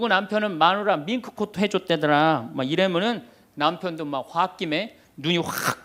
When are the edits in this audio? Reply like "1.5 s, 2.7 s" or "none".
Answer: none